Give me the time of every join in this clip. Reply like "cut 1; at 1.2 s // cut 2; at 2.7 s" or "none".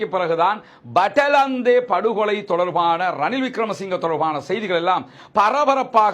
none